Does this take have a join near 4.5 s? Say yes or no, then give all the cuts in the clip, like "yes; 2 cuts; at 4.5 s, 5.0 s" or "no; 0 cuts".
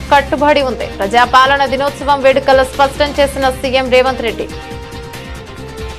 yes; 1 cut; at 4.5 s